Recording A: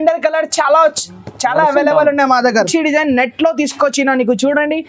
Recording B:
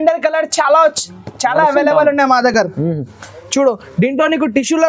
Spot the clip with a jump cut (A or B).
A